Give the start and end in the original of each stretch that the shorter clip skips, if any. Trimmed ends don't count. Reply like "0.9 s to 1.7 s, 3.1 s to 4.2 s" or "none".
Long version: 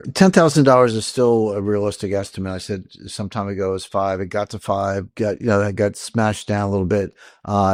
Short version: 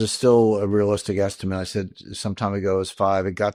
none